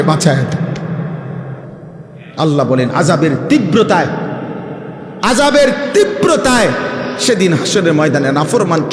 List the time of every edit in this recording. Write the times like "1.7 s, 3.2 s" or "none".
2.1 s